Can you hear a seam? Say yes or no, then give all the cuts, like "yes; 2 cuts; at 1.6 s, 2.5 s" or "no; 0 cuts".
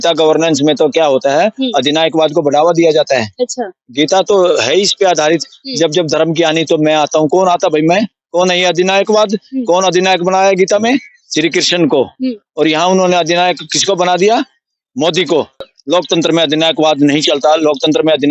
no; 0 cuts